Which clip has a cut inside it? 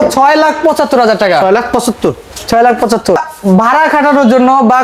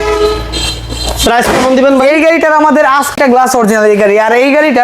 second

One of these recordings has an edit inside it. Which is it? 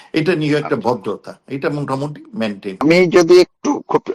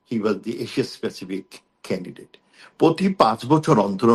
first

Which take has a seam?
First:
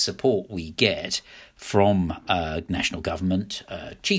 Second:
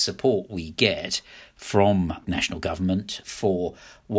second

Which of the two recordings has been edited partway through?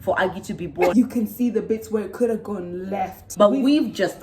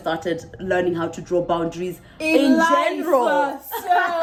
first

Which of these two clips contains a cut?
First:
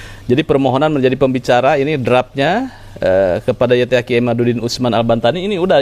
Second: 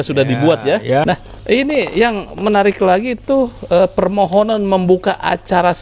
second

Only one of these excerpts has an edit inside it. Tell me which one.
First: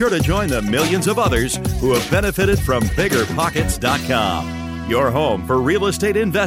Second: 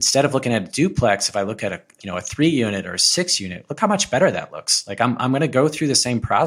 second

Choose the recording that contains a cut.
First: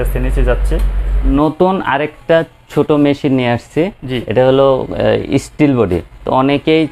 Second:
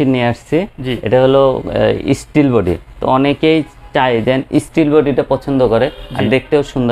first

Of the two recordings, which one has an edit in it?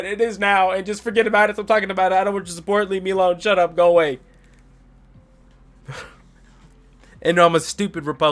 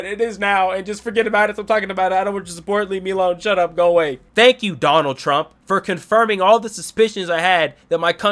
second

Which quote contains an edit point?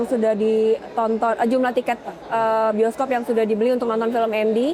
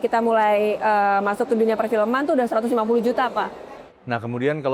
second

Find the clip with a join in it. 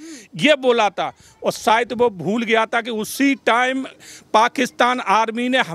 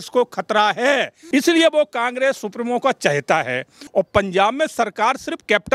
second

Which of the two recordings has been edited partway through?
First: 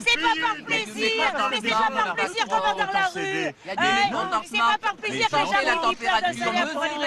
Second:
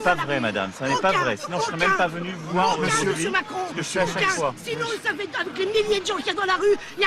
second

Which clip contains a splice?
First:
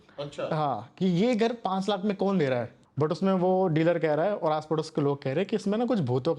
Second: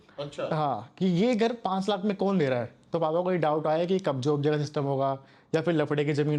first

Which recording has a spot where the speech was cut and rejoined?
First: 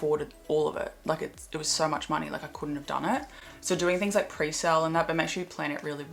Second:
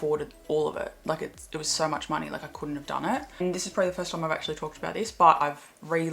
second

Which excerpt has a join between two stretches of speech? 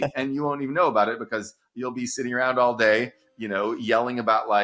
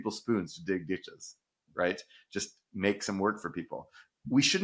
first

